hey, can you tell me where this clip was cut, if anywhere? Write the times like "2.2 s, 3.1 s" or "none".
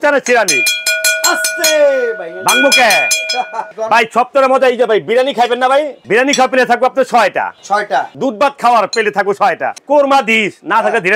3.6 s, 6.0 s, 8.1 s, 9.8 s